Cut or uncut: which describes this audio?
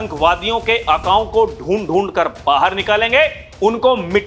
uncut